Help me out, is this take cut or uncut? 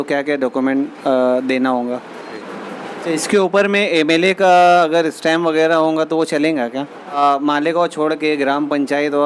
cut